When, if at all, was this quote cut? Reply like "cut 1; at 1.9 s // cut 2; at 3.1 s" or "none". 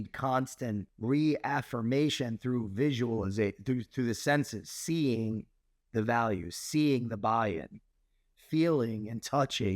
cut 1; at 0.9 s